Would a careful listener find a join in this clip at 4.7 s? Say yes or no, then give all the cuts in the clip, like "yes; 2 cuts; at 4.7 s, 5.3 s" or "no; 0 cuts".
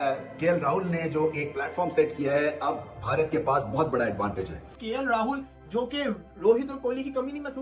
yes; 1 cut; at 4.7 s